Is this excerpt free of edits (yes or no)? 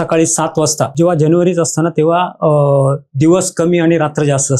no